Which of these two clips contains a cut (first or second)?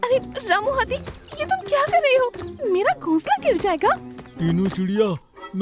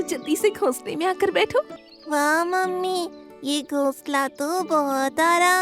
second